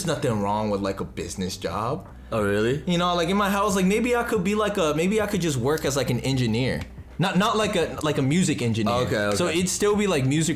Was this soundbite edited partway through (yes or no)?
no